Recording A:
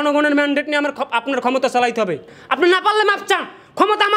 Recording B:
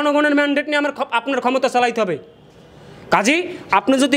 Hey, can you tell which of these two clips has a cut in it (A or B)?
A